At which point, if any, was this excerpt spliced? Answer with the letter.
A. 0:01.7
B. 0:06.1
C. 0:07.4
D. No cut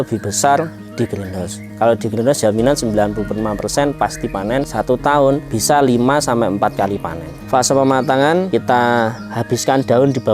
C